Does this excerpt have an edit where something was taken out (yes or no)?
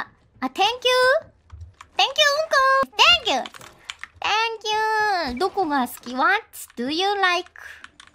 yes